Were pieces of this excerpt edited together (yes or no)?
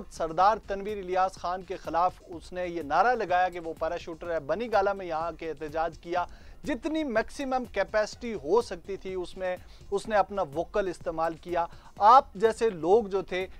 no